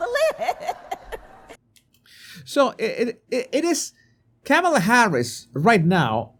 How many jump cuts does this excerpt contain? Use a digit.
0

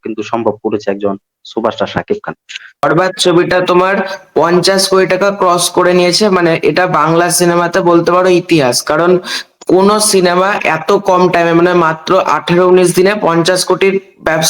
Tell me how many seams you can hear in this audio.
1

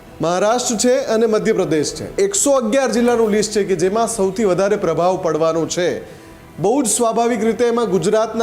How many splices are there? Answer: 1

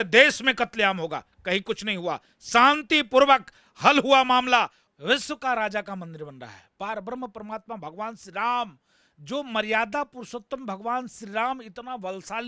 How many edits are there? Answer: 1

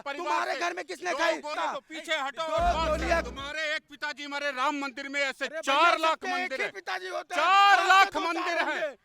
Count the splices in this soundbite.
2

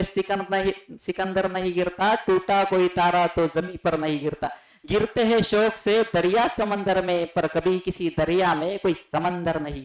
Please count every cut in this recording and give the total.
0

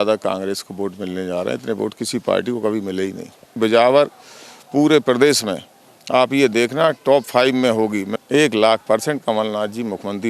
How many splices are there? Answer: 2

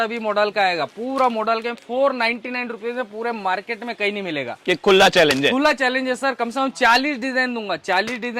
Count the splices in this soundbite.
0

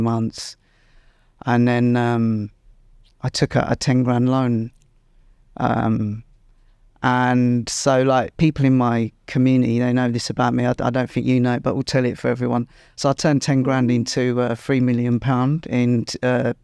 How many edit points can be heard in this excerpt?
0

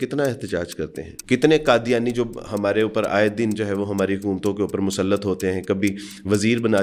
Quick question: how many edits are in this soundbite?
1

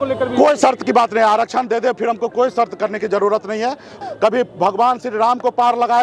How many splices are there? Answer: 1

